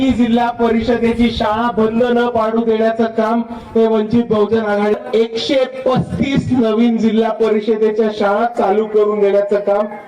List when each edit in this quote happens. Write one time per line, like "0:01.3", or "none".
0:04.9